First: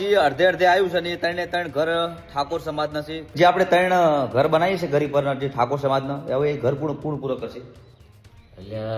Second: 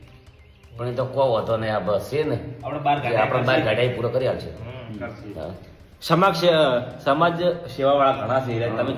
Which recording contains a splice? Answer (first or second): first